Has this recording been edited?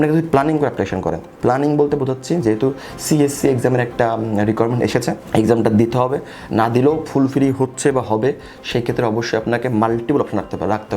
no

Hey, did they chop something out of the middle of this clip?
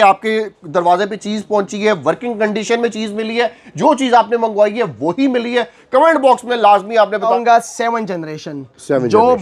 yes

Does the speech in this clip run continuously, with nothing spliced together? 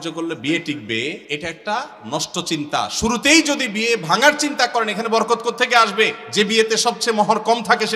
no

